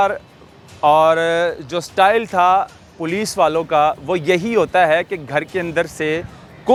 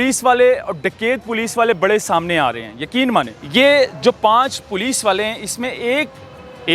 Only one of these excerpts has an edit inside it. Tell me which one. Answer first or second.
second